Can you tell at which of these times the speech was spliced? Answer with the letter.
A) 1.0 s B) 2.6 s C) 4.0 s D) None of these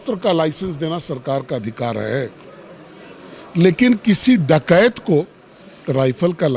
D